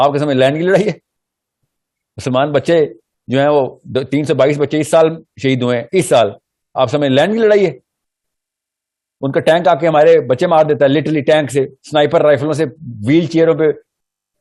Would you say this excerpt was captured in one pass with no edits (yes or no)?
yes